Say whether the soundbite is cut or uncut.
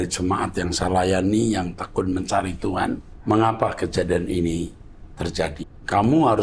cut